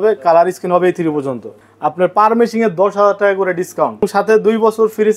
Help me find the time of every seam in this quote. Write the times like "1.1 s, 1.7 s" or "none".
1.5 s, 4.0 s